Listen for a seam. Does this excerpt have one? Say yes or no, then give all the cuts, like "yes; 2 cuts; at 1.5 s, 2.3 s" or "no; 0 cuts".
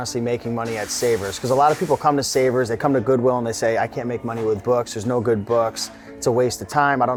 no; 0 cuts